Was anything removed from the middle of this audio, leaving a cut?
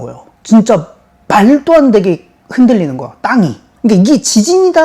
yes; 1 cut; at 3.6 s

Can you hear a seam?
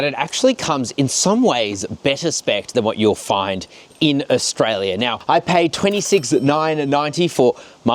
no; 0 cuts

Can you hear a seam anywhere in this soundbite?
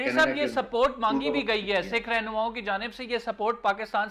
no; 0 cuts

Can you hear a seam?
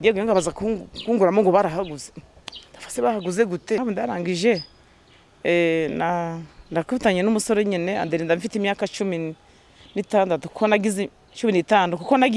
yes; 1 cut; at 3.8 s

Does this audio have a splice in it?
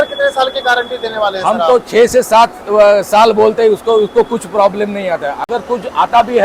no; 0 cuts

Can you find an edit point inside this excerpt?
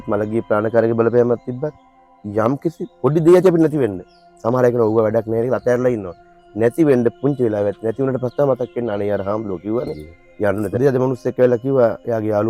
yes; 1 cut; at 10.8 s

